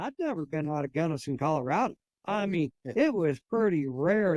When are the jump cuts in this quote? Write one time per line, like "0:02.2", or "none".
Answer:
0:02.1